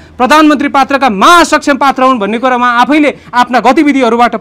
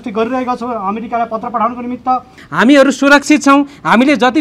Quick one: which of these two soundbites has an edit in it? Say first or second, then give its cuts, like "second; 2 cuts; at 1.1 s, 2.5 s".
second; 1 cut; at 2.4 s